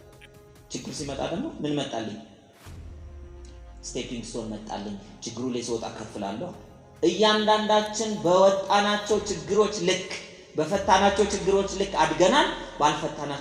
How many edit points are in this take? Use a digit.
0